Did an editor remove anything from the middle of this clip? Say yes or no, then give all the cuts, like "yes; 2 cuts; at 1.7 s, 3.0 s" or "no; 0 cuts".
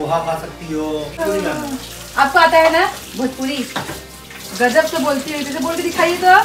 yes; 1 cut; at 1.2 s